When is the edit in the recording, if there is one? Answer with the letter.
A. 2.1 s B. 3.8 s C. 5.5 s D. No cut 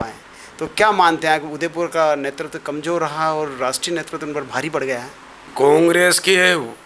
C